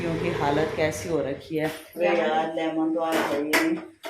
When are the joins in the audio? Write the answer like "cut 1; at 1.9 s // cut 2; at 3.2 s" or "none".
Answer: cut 1; at 1.8 s